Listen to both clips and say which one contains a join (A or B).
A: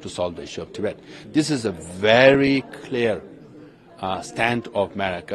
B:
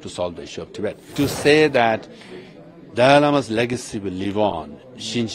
B